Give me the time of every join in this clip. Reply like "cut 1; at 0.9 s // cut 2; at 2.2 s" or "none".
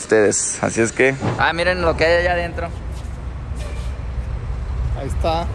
cut 1; at 1.3 s